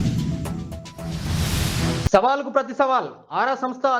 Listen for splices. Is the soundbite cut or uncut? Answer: cut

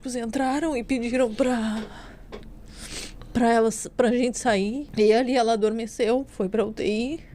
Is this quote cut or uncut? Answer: cut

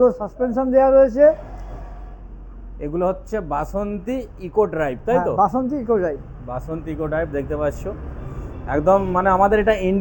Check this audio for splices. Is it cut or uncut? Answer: uncut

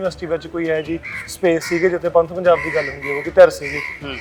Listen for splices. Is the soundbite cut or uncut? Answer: uncut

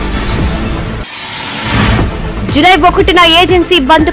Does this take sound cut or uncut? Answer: cut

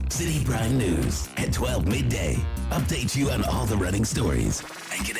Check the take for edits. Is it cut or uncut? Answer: uncut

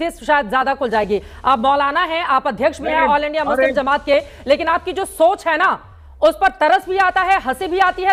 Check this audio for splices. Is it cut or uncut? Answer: uncut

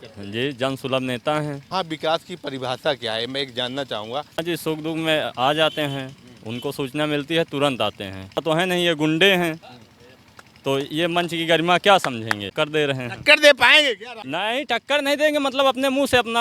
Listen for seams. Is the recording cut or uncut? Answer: cut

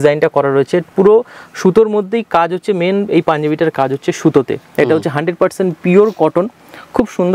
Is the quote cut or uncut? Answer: uncut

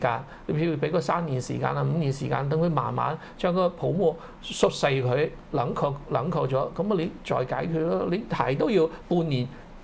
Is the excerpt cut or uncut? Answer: uncut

